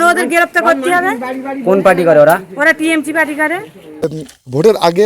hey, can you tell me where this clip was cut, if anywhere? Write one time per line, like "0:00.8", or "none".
0:04.2